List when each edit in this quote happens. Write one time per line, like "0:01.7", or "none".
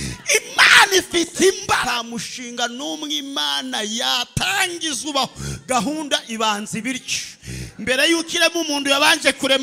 0:01.8